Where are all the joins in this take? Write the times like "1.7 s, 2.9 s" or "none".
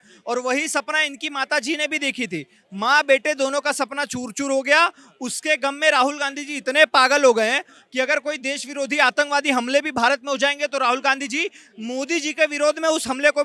none